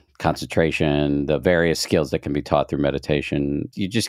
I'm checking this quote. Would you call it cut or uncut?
uncut